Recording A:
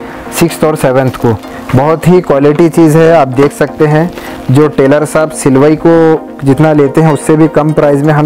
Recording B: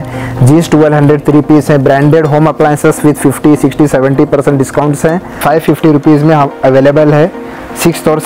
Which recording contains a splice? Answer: B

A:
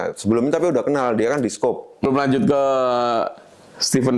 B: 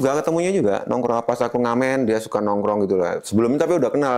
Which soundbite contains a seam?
A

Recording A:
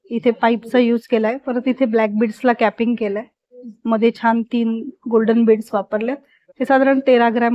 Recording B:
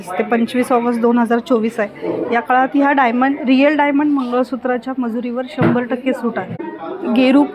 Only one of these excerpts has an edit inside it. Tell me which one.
B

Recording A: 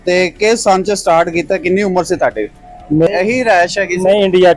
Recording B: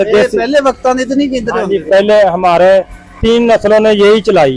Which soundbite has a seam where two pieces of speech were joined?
A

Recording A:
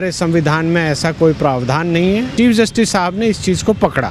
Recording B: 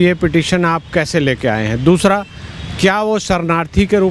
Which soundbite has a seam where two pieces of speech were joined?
A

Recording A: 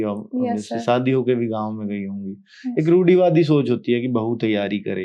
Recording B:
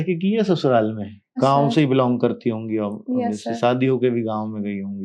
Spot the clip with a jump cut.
B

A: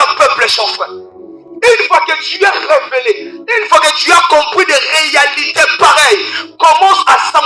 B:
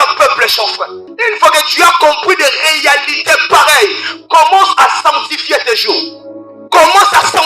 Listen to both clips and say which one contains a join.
B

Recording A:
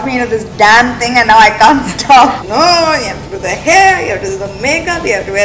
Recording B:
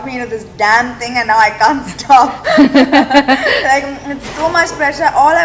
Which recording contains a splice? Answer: A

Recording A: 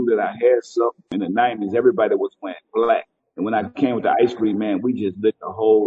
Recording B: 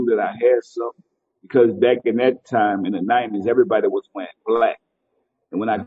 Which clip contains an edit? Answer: A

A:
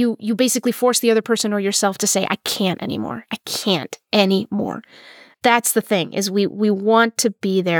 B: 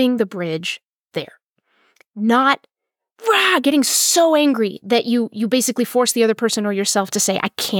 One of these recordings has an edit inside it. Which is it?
A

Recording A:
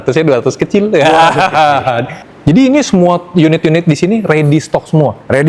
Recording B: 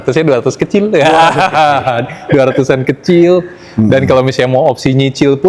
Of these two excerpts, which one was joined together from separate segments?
A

